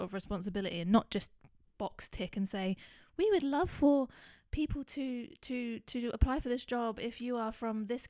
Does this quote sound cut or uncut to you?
uncut